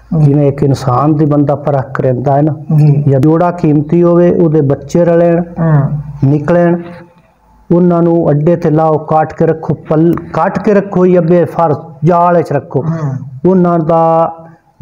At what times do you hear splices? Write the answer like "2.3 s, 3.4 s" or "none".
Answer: 3.2 s